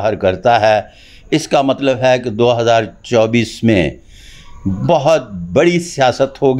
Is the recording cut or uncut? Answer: uncut